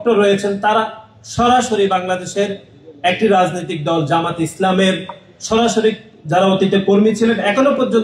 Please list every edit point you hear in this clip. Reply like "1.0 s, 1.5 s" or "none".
none

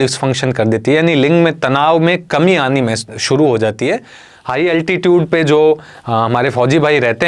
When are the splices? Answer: 4.3 s

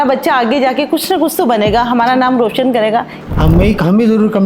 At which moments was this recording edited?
3.1 s

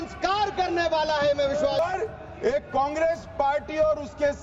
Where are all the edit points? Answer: 1.8 s

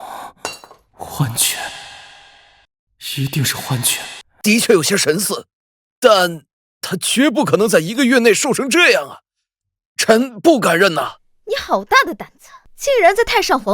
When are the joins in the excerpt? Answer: 4.3 s

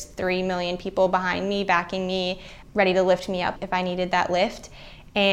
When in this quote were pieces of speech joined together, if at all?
none

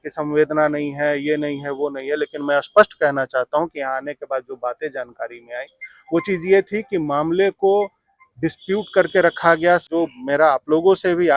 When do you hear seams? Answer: 9.9 s

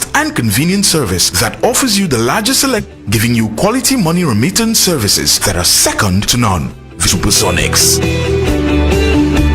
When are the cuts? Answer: 2.9 s, 7.0 s

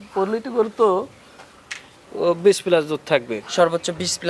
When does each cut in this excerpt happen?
none

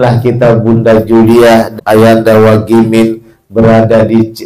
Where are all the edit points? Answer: 1.7 s

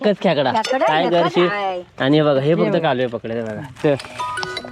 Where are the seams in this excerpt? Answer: 3.8 s

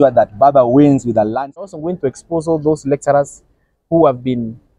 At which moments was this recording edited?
1.7 s

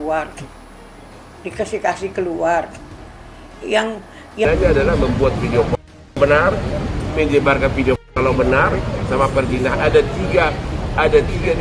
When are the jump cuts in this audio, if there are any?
4.4 s

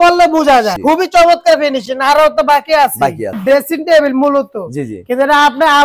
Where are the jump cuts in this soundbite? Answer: 3.4 s

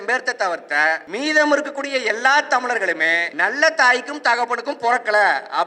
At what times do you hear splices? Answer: 1.1 s, 3.3 s

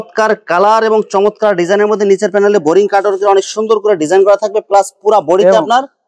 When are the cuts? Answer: none

